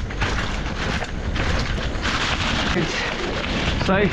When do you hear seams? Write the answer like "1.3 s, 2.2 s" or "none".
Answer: 2.8 s

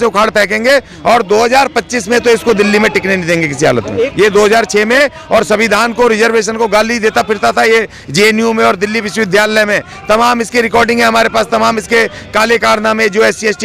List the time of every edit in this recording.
4.1 s

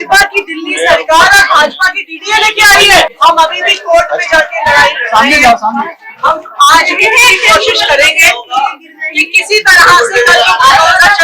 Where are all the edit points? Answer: 3.1 s

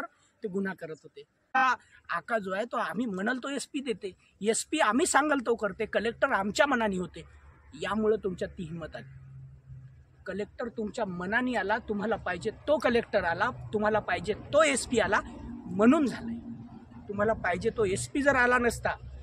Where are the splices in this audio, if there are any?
1.5 s

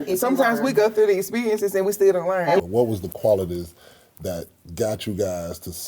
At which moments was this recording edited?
2.6 s

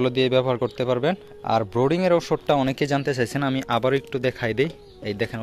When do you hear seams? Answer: 1.3 s

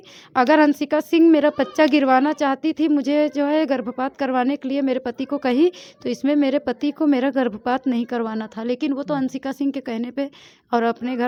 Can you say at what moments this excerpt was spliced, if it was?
none

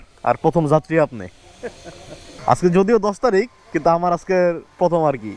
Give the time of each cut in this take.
none

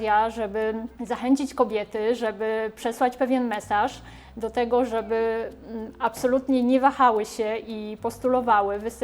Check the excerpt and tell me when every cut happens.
0.9 s

